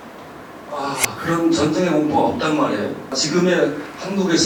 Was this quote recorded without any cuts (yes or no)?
yes